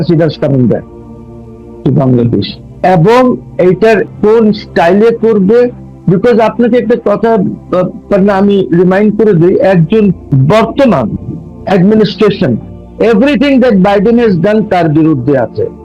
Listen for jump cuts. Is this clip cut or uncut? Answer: cut